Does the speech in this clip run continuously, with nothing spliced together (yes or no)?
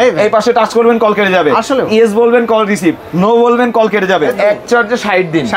no